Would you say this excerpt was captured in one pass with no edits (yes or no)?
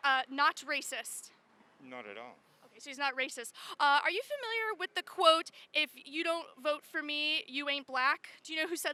yes